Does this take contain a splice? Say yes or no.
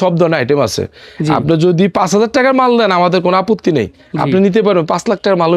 no